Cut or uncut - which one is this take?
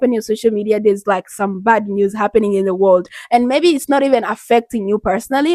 uncut